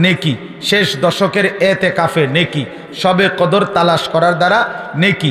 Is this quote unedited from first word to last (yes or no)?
yes